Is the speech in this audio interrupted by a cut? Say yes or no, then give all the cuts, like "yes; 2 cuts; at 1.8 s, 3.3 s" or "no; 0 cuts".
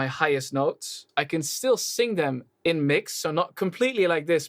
yes; 1 cut; at 1.1 s